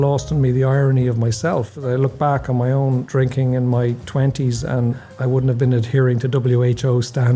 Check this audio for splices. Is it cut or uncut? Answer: cut